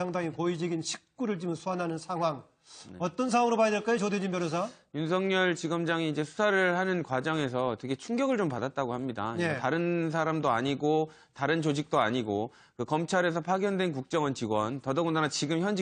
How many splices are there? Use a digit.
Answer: 1